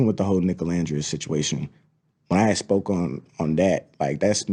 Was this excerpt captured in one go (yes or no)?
yes